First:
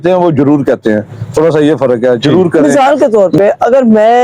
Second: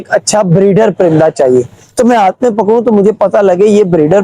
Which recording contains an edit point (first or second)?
first